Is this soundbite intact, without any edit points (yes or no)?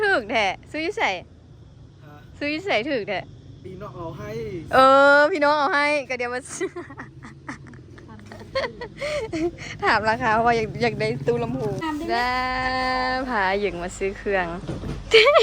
no